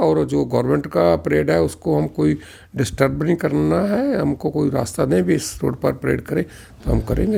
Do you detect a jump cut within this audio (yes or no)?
no